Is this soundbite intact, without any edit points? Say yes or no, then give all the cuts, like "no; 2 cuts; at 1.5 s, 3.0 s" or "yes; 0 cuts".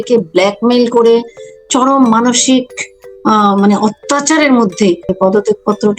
no; 1 cut; at 5.1 s